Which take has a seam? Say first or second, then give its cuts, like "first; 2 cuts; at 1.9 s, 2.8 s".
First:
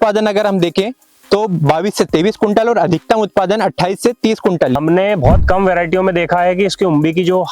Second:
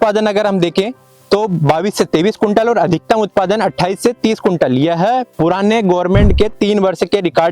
first; 1 cut; at 4.8 s